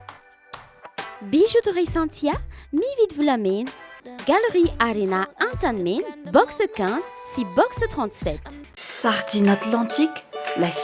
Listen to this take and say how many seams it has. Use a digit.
1